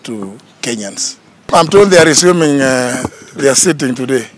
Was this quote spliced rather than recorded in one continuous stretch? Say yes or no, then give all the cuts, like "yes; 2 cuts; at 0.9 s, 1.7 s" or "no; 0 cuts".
yes; 1 cut; at 1.5 s